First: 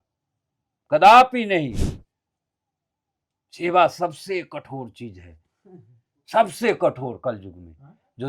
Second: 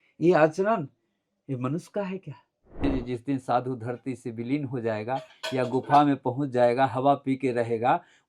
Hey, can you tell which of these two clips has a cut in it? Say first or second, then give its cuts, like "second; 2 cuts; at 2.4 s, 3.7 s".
second; 1 cut; at 2.8 s